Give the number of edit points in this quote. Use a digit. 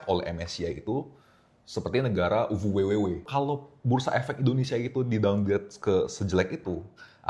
1